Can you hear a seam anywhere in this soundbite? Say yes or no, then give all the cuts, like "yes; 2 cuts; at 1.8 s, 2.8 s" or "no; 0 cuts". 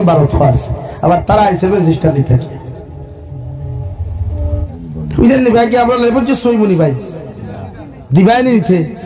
yes; 1 cut; at 4.7 s